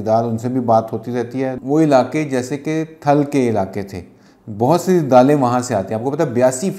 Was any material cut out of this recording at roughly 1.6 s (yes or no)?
yes